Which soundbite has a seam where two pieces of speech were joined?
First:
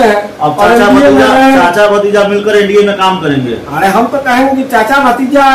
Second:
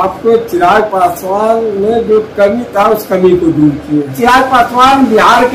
second; 1 cut; at 4.1 s

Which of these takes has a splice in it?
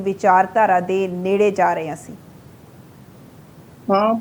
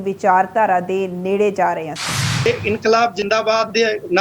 second; 1 cut; at 2.5 s

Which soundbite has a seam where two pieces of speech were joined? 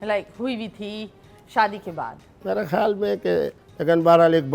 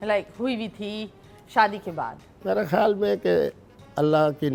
first; 1 cut; at 3.6 s

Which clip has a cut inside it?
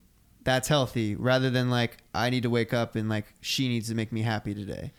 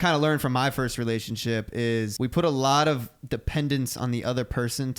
second; 1 cut; at 2.1 s

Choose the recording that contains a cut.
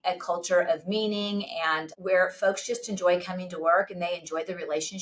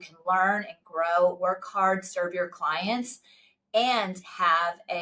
first; 1 cut; at 1.9 s

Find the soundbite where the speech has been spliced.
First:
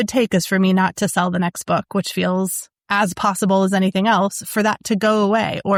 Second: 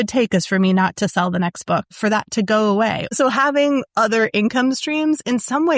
second; 2 cuts; at 1.9 s, 3.1 s

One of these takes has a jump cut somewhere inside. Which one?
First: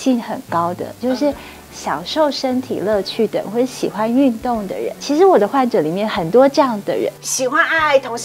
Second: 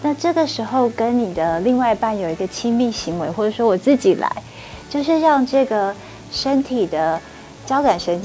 first; 2 cuts; at 5.0 s, 7.2 s

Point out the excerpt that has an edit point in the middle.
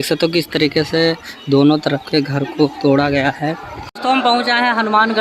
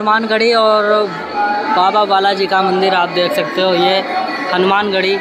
first; 1 cut; at 3.9 s

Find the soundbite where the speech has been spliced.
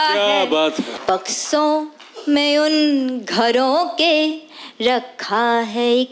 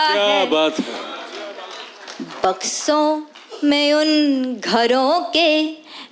first; 1 cut; at 0.9 s

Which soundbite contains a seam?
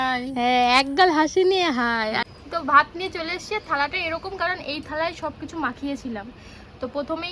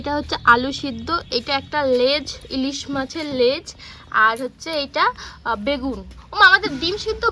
first; 1 cut; at 2.2 s

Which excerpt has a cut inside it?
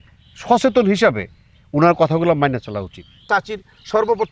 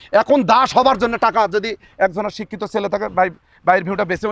first; 1 cut; at 3.2 s

